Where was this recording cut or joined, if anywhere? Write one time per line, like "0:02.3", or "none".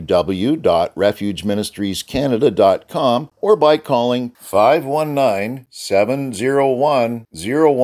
0:03.3